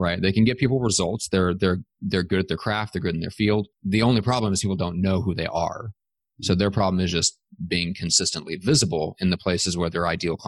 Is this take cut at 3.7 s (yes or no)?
yes